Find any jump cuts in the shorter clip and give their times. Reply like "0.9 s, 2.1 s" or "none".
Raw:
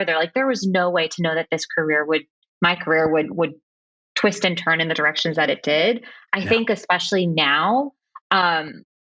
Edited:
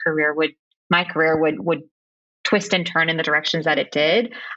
none

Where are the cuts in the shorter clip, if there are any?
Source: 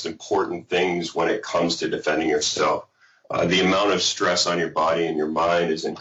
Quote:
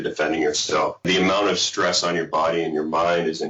1.1 s

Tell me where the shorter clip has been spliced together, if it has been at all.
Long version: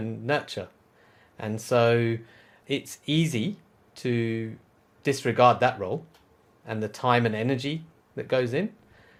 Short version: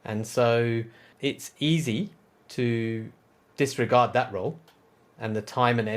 1.0 s

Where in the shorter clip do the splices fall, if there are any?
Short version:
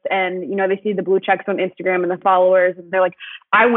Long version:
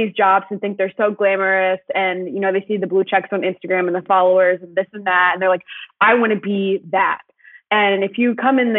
2.9 s

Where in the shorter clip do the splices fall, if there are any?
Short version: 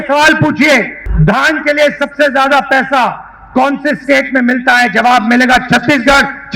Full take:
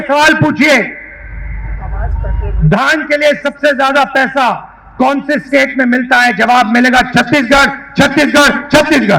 1.0 s

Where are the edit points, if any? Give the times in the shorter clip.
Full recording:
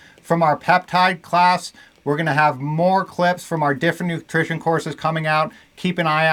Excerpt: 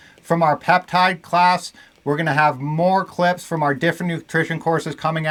none

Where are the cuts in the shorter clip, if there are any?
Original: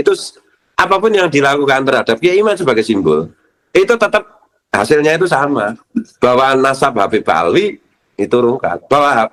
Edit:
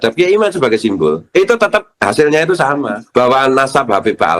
1.2 s, 1.9 s, 2.9 s

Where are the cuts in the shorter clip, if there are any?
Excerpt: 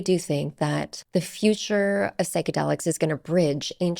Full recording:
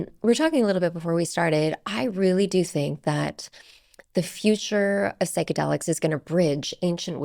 0.9 s

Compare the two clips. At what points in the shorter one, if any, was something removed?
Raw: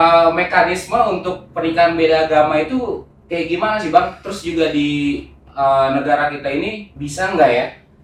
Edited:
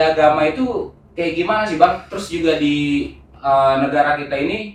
none

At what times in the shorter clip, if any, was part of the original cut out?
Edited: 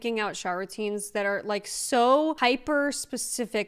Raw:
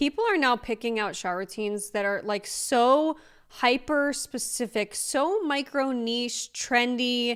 2.4 s

